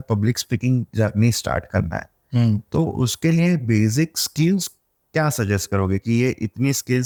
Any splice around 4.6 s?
no; 0 cuts

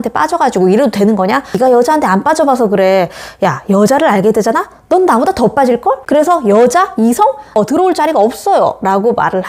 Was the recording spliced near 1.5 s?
yes; 2 cuts; at 1.5 s, 6.0 s

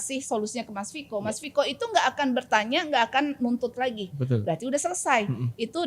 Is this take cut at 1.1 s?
no; 0 cuts

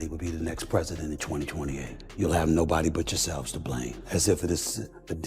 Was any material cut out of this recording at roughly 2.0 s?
yes; 2 cuts; at 2.0 s, 4.0 s

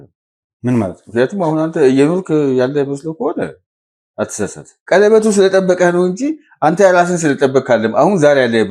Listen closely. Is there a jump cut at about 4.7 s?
yes; 1 cut; at 4.7 s

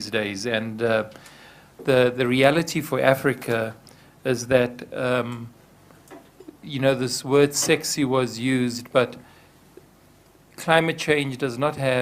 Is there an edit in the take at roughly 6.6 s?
no; 1 cut; at 10.5 s

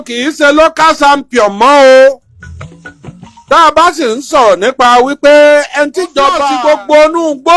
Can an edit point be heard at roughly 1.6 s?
no; 1 cut; at 6.4 s

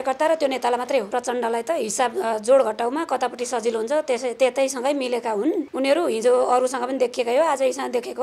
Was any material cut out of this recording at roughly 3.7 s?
no; 2 cuts; at 1.1 s, 5.7 s

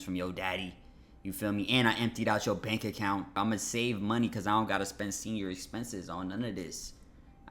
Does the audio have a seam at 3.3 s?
yes; 1 cut; at 3.3 s

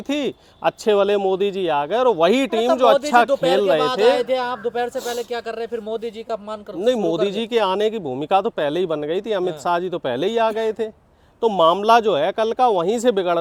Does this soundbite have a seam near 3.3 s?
no; 0 cuts

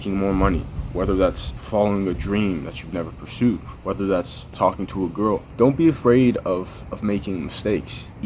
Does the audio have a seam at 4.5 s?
yes; 3 cuts; at 1.6 s, 4.5 s, 5.7 s

